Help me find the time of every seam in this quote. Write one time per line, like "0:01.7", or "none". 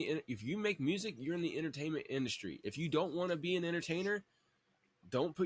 none